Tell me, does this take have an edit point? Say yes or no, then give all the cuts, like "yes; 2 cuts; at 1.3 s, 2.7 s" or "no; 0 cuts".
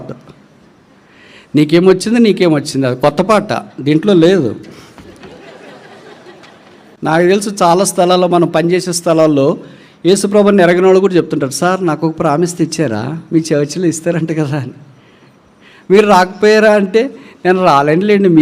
yes; 1 cut; at 7.0 s